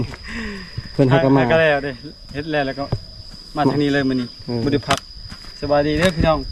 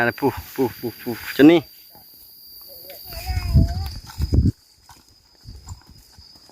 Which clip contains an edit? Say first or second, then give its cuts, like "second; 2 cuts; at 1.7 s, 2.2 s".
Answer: second; 1 cut; at 3.0 s